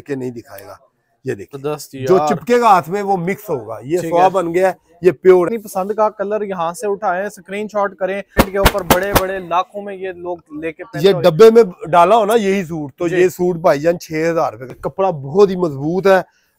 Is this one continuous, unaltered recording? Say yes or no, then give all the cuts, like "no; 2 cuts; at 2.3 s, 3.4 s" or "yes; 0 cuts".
no; 4 cuts; at 1.6 s, 5.6 s, 8.3 s, 14.8 s